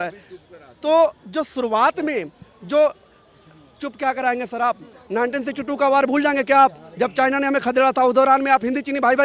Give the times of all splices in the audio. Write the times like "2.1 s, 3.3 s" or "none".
none